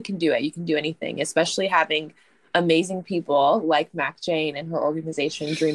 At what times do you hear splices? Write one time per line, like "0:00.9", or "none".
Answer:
none